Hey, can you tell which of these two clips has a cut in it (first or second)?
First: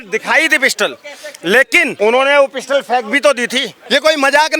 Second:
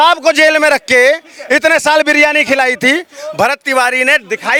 first